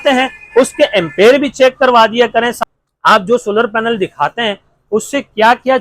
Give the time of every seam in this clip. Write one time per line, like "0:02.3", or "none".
0:02.5

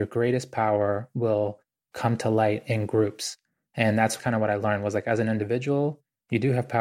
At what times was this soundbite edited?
0:04.2

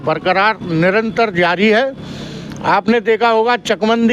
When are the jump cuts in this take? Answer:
none

